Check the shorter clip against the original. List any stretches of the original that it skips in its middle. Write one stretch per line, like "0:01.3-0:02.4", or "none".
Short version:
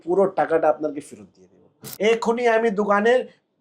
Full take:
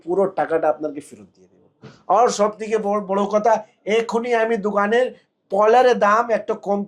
0:01.9-0:03.7